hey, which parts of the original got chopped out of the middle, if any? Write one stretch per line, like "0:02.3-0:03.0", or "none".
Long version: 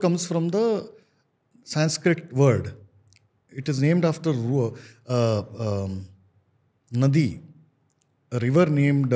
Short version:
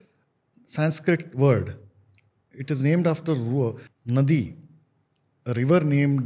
0:04.9-0:06.8